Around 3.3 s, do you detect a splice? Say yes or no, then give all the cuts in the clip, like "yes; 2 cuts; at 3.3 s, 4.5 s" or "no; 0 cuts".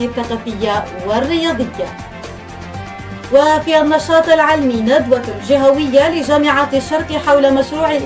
yes; 2 cuts; at 1.9 s, 3.3 s